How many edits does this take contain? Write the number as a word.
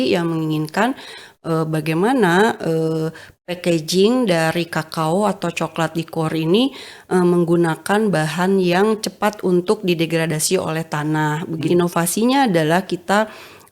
one